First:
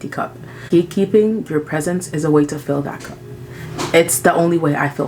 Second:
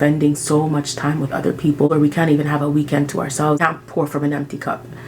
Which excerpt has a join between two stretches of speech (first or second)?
second